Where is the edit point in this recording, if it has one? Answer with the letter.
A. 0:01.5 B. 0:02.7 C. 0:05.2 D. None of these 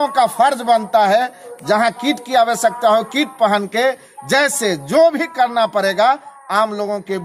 A